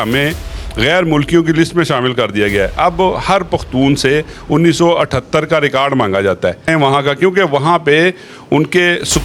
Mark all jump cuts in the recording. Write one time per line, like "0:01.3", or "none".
0:06.7

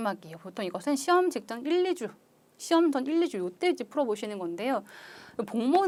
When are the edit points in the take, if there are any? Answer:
none

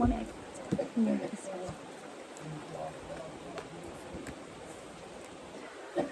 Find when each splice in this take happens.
none

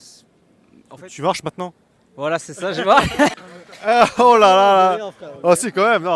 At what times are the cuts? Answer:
0:03.3

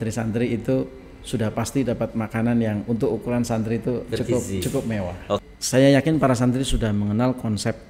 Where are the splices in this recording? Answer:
0:05.4

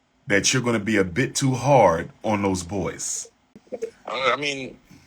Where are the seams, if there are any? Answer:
0:03.6

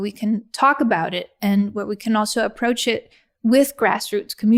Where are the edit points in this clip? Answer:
none

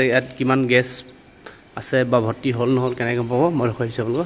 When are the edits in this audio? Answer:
none

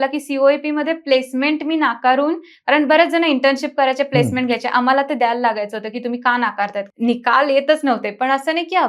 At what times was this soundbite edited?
0:06.8

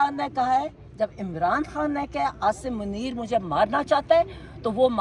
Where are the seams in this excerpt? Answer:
none

